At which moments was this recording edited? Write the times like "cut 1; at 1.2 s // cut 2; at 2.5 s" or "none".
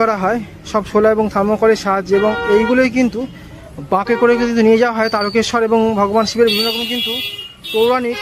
cut 1; at 3.2 s

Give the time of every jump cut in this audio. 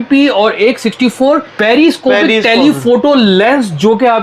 cut 1; at 1.5 s

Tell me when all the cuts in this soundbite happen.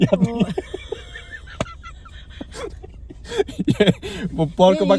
cut 1; at 1.2 s

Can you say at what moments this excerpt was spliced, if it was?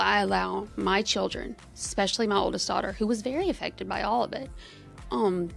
none

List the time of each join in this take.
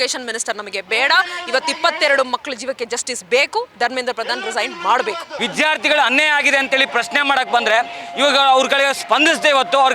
cut 1; at 5.3 s

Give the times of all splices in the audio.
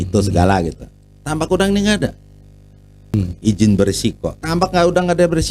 cut 1; at 3.1 s

